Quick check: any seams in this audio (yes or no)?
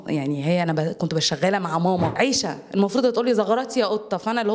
yes